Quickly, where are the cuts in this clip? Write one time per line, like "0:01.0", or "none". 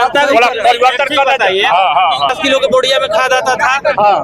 0:02.4